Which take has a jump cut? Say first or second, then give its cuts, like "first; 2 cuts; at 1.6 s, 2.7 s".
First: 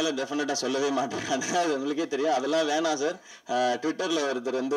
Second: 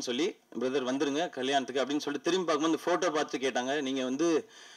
first; 1 cut; at 3.3 s